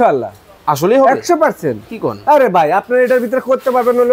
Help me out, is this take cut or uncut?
uncut